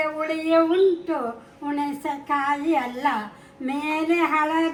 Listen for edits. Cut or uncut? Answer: uncut